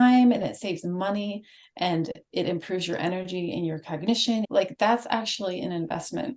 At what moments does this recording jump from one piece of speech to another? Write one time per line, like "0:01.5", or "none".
0:04.5